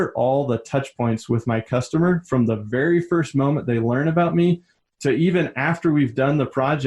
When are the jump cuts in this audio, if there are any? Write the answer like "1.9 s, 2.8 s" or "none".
none